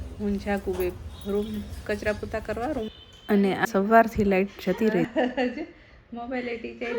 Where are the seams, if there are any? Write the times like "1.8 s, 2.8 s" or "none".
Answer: 3.6 s